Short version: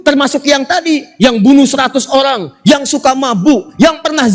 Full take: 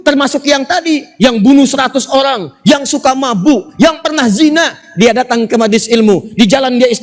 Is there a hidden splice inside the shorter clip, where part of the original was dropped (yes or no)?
no